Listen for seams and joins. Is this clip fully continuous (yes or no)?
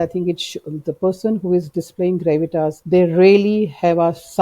no